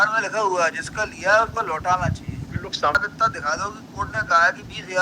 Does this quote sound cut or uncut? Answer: cut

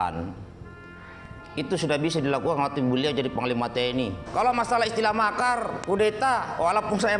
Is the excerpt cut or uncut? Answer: cut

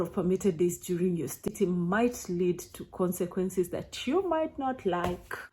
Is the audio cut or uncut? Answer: cut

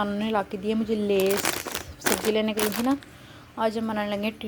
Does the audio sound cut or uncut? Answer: uncut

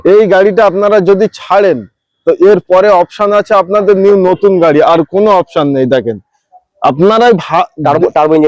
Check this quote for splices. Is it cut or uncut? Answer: uncut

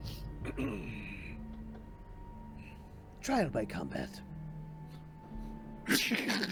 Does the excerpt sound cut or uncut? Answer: uncut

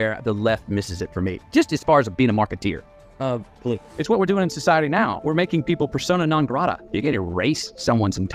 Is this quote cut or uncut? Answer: uncut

